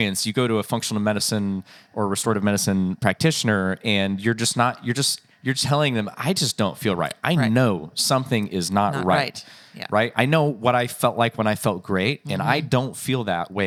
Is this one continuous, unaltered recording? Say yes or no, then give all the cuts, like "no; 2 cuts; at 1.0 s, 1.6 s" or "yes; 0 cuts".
yes; 0 cuts